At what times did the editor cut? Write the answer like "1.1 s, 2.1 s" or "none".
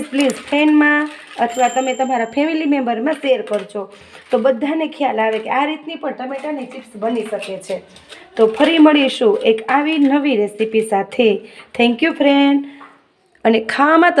none

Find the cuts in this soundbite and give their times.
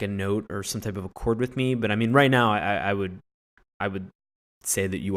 none

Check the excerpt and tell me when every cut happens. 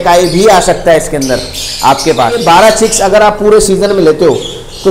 2.4 s

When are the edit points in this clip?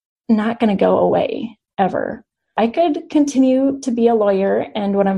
2.5 s

